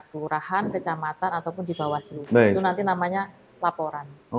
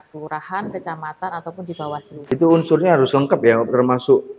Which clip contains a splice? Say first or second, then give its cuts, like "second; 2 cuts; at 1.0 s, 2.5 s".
second; 1 cut; at 2.3 s